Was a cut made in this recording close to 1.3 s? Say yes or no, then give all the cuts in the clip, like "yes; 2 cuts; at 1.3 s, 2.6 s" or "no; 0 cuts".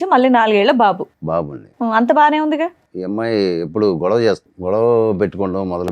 no; 2 cuts; at 2.9 s, 4.5 s